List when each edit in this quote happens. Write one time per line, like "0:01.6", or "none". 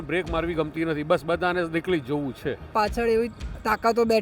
0:02.6